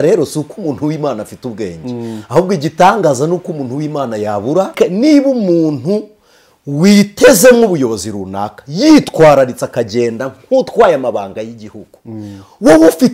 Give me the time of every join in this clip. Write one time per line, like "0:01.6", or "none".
0:04.7

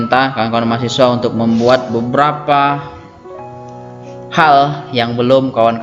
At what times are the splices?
0:03.0
0:04.3

